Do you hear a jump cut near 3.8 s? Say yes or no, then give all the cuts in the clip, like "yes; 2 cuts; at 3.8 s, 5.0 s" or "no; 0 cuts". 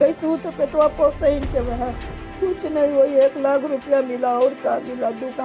no; 1 cut; at 2.2 s